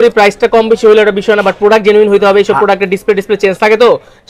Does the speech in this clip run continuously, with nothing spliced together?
yes; 0 cuts

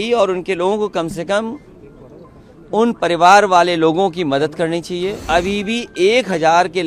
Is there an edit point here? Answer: yes; 1 cut; at 5.2 s

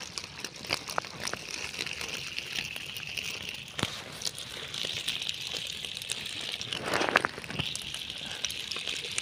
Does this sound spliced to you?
no; 0 cuts

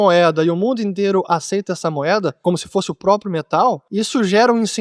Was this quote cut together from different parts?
yes; 2 cuts; at 2.4 s, 3.8 s

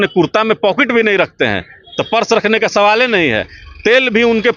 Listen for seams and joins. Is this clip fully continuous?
yes; 0 cuts

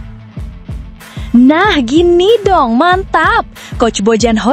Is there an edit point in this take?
yes; 1 cut; at 1.3 s

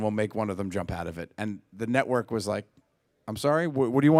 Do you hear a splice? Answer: no; 0 cuts

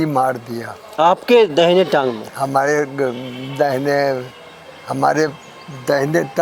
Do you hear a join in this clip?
no; 0 cuts

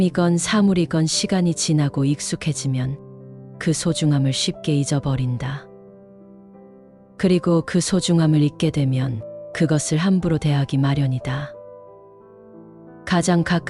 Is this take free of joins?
yes; 0 cuts

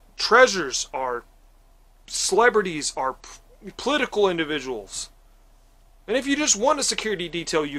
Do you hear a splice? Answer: no; 0 cuts

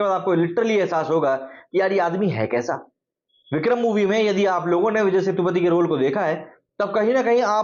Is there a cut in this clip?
no; 0 cuts

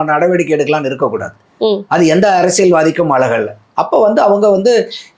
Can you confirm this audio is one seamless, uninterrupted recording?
yes; 0 cuts

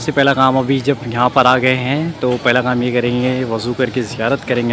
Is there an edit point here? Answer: no; 0 cuts

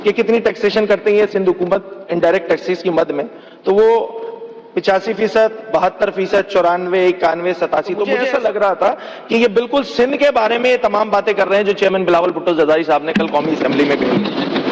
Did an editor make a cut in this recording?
yes; 1 cut; at 8.2 s

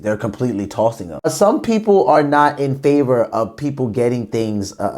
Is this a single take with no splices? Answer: no; 1 cut; at 1.2 s

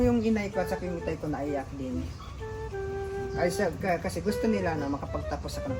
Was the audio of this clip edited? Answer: no; 0 cuts

